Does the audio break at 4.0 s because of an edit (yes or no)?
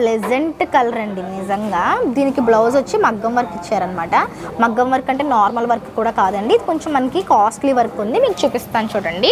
no